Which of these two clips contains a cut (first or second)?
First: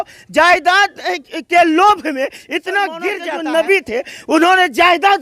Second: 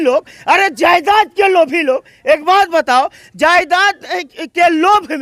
first